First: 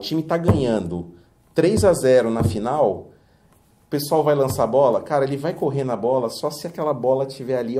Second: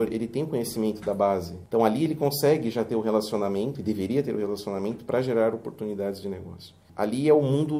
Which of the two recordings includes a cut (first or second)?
second